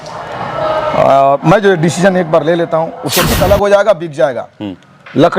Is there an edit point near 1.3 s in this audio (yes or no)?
no